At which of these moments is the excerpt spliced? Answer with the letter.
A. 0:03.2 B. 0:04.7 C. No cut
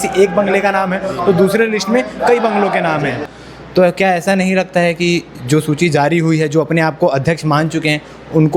A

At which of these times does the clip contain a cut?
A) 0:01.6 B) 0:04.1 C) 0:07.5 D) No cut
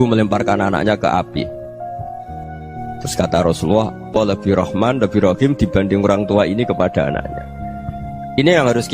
B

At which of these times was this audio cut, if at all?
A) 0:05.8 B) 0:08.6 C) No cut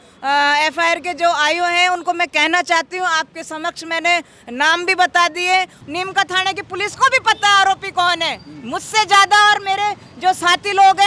A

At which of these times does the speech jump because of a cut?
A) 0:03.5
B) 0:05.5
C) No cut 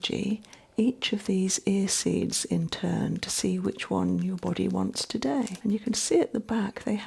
B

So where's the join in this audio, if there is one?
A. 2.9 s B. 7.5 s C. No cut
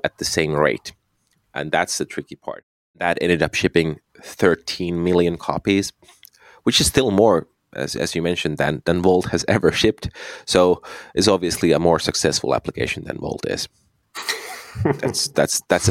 A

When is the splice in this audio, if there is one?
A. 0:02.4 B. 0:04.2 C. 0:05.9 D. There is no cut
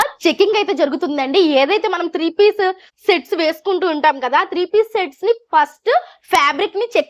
D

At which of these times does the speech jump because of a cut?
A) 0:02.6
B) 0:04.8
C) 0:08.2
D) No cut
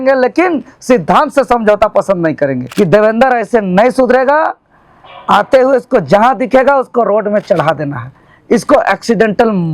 A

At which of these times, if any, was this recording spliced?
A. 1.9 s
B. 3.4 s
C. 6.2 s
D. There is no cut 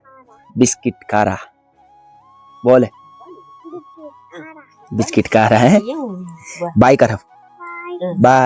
D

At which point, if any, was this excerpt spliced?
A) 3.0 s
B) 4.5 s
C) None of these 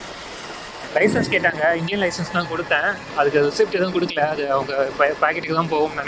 A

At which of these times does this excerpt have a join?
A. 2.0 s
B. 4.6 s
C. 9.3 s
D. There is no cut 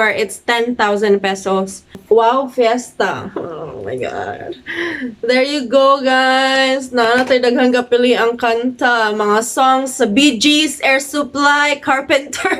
A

